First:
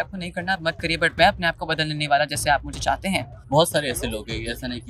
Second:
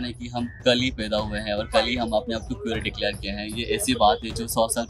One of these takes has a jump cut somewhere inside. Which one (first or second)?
first